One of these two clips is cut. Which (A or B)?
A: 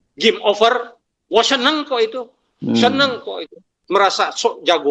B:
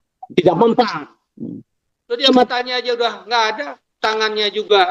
A